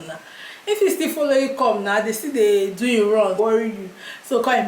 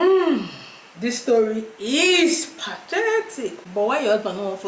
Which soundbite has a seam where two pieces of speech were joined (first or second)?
first